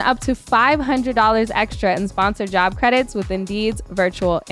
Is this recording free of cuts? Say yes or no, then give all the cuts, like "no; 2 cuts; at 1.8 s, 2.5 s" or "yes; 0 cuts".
yes; 0 cuts